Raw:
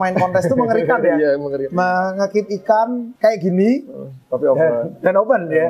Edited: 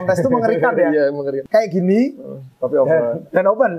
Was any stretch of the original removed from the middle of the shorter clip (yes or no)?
yes